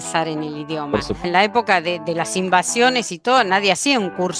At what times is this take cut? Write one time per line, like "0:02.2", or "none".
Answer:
0:01.2